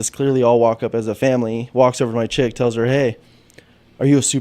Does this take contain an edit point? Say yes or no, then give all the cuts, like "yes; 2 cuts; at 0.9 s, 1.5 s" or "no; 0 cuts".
no; 0 cuts